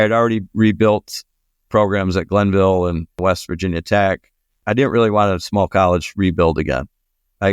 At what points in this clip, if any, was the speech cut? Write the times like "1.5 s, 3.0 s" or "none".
1.7 s, 3.2 s, 4.6 s